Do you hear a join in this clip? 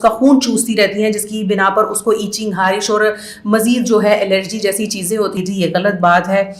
yes; 1 cut; at 5.4 s

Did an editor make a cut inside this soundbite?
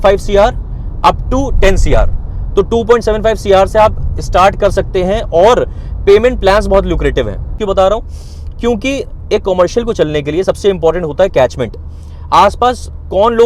yes; 1 cut; at 7.5 s

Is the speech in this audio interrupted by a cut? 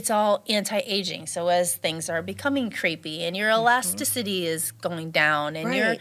no; 0 cuts

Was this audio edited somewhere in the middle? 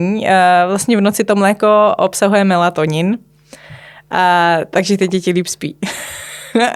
no; 0 cuts

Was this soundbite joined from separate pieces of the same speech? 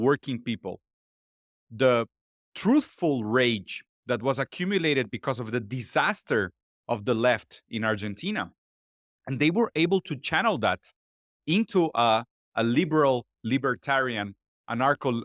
no; 0 cuts

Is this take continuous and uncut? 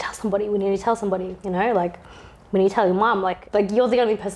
no; 1 cut; at 3.4 s

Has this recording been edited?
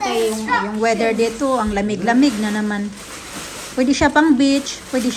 no; 0 cuts

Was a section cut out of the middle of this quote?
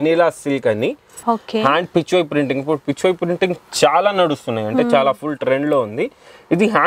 yes; 1 cut; at 1.1 s

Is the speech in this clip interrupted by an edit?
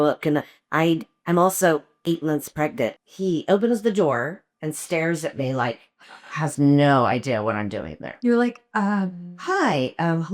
yes; 1 cut; at 3.0 s

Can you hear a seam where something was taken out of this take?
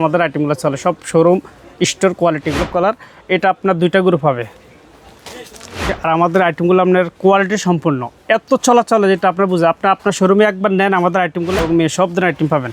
yes; 3 cuts; at 2.7 s, 6.0 s, 11.6 s

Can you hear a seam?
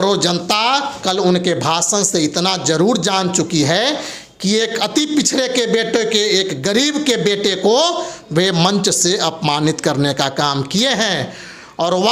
no; 0 cuts

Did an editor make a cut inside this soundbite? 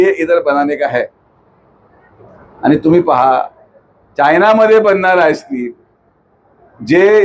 no; 0 cuts

